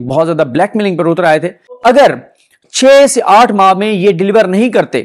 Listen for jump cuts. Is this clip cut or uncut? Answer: cut